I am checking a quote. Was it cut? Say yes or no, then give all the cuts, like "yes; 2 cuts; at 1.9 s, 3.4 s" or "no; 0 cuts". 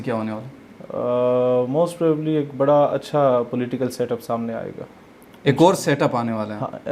no; 0 cuts